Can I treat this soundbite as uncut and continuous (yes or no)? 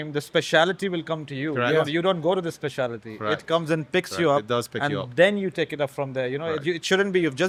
yes